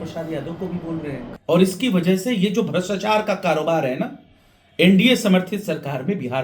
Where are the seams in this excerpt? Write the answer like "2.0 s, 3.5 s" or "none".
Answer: 1.3 s